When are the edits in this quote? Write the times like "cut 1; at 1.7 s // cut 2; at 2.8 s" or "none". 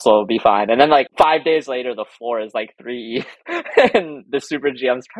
cut 1; at 1.1 s